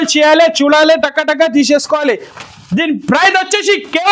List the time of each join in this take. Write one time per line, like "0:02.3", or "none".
none